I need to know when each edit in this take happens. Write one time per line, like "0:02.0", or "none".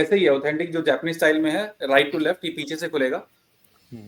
none